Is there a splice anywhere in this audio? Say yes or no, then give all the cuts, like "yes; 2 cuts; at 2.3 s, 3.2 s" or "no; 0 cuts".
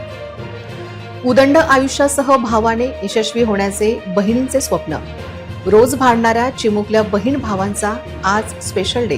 yes; 1 cut; at 1.2 s